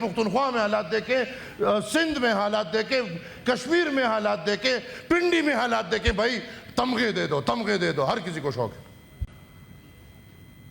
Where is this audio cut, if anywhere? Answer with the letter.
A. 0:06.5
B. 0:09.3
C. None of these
B